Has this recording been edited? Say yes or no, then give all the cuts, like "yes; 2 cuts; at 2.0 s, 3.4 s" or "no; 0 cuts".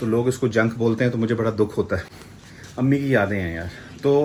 no; 0 cuts